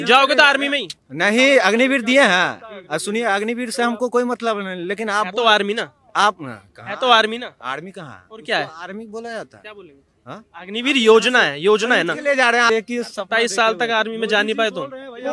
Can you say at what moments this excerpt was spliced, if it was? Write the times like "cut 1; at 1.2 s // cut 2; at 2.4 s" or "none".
cut 1; at 12.7 s